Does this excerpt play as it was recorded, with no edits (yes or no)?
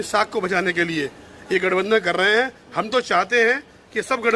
yes